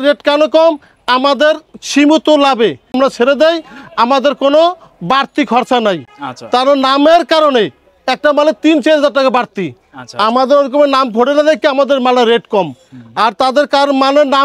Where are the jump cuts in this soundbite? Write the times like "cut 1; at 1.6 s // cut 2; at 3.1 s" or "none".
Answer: none